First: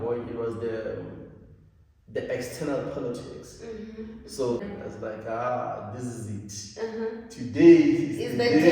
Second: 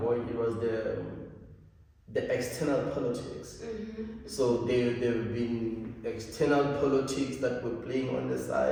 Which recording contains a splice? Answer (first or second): first